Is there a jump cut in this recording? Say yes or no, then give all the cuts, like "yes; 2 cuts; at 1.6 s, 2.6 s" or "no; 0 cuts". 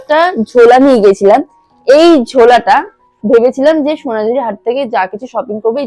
no; 0 cuts